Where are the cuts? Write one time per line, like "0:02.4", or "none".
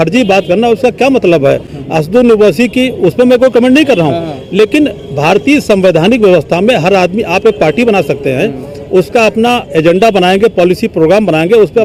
none